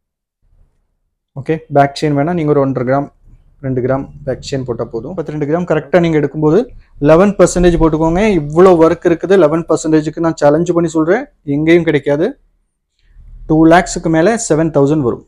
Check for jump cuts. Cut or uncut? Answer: cut